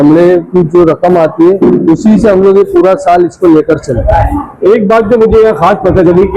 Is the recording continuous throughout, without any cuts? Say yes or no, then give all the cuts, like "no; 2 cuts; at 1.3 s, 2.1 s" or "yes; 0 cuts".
yes; 0 cuts